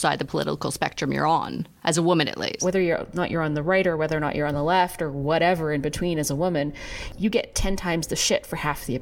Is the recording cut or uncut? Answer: cut